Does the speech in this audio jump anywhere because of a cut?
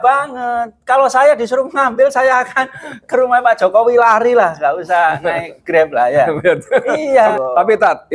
no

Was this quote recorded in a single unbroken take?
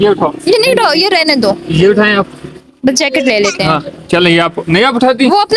yes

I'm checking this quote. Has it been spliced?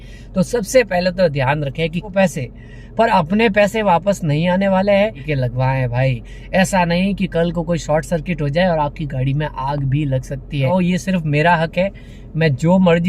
yes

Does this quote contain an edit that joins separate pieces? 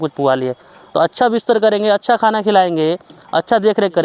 no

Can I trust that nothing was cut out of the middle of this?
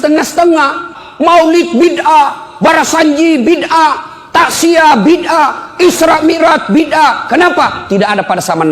no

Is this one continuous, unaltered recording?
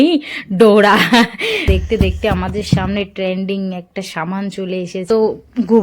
no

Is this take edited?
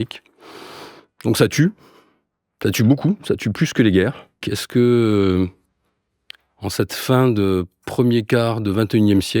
yes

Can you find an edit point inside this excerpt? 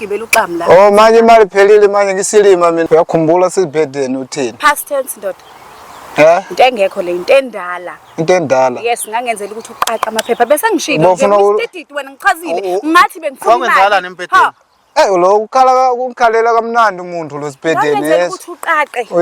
yes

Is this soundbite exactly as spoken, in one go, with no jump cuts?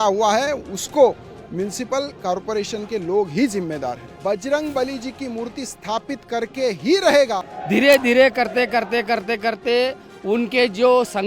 no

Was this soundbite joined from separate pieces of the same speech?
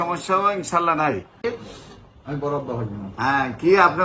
yes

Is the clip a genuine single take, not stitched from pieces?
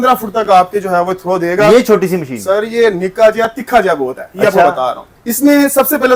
yes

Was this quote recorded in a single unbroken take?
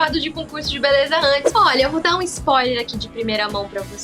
no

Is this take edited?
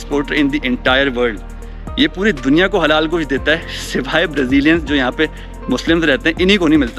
no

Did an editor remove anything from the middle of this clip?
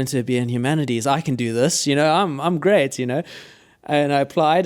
no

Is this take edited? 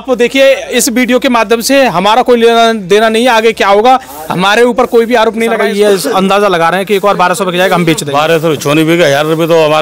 yes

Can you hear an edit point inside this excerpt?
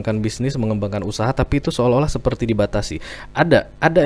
no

